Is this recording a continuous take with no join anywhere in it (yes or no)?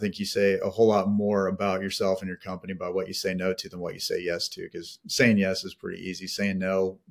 yes